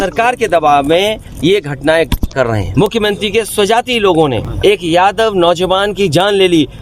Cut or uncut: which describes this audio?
cut